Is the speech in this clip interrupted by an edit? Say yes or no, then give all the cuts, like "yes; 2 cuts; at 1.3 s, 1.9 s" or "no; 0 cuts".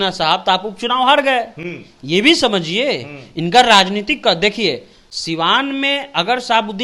no; 0 cuts